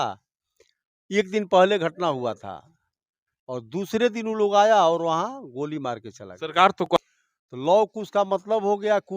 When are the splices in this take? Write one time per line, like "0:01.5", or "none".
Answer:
0:06.9